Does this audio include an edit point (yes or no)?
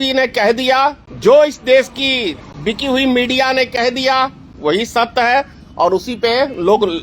yes